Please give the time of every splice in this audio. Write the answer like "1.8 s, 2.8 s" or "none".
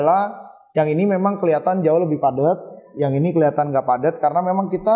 none

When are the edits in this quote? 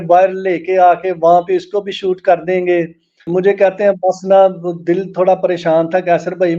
3.2 s

